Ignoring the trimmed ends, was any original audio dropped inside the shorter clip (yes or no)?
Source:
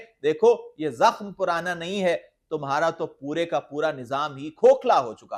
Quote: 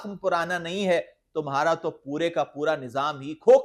no